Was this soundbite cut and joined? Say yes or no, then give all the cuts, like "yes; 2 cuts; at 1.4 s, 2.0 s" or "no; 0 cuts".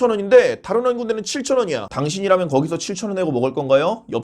yes; 1 cut; at 1.9 s